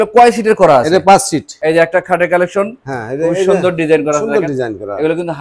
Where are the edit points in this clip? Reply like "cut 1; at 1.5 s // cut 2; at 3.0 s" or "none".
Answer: cut 1; at 1.5 s